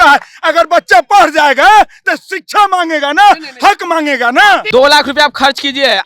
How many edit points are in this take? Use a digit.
1